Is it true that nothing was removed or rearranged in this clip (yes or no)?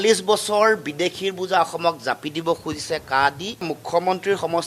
no